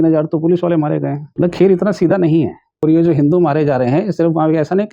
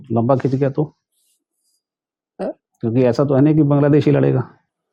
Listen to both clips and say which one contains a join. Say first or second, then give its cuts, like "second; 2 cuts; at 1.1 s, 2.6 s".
first; 2 cuts; at 1.2 s, 2.8 s